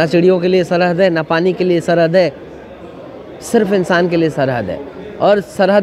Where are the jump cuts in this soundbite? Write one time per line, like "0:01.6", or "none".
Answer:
none